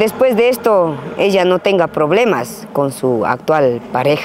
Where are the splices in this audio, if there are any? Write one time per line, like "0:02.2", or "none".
none